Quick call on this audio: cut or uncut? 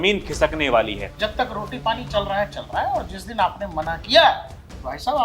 cut